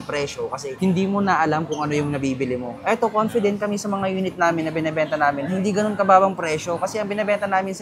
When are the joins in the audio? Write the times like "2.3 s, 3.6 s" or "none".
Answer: none